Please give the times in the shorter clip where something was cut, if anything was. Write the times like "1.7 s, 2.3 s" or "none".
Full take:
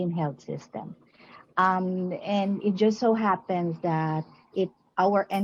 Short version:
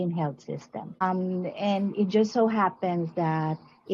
1.0 s